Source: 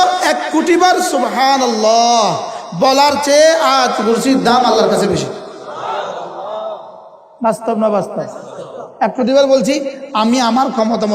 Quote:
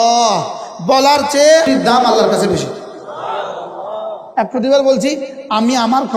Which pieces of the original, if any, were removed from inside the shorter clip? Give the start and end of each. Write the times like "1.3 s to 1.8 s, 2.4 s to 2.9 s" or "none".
3.6 s to 4.3 s, 6.8 s to 8.8 s